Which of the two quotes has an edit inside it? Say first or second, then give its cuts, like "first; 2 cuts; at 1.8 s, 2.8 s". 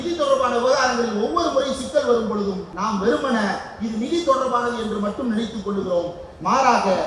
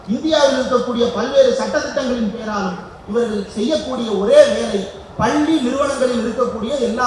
first; 1 cut; at 2.7 s